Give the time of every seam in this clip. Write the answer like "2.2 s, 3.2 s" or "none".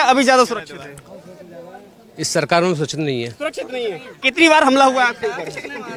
none

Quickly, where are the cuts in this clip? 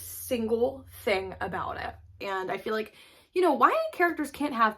2.1 s

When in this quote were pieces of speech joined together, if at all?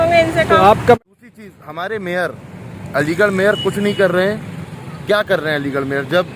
1.0 s

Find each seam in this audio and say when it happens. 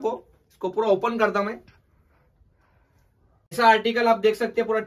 3.5 s

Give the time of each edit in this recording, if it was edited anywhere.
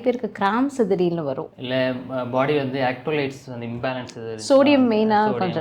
1.5 s

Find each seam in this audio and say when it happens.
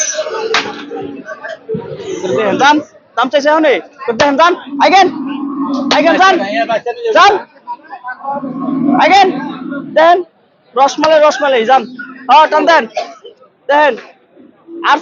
2.1 s

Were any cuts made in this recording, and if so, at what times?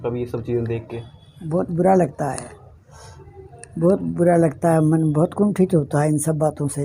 none

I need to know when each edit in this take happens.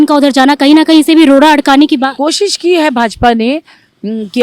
2.1 s

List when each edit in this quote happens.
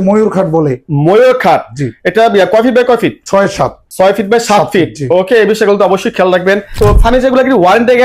6.7 s

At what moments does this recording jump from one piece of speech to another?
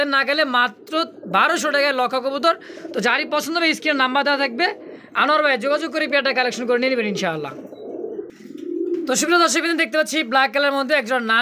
none

